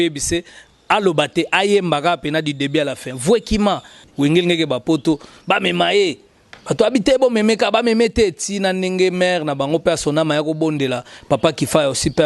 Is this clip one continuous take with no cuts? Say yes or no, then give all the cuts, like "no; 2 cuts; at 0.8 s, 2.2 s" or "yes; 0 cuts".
no; 1 cut; at 4.0 s